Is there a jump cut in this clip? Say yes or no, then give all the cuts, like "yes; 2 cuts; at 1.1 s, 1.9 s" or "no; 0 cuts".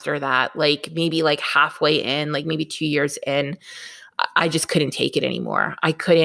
no; 0 cuts